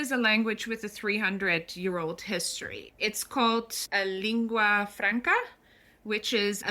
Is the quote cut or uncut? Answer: cut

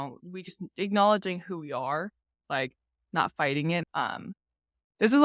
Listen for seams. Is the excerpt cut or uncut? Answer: cut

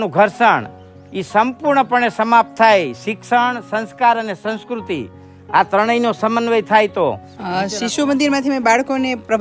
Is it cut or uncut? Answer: cut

